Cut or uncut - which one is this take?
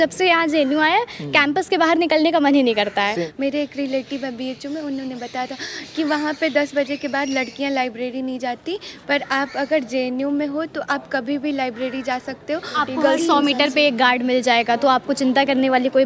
cut